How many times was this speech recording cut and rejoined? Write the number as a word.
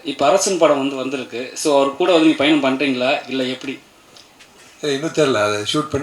zero